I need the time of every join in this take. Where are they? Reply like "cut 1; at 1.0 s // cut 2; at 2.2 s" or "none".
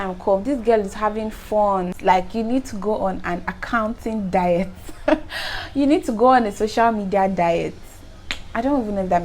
cut 1; at 2.0 s